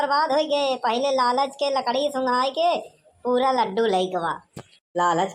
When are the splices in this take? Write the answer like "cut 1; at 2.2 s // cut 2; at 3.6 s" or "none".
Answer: none